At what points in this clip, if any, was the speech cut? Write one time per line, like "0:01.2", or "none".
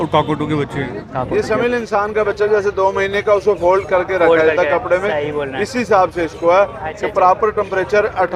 0:01.3